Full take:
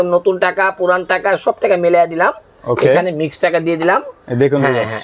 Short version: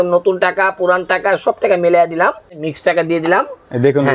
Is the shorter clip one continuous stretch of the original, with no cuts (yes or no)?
no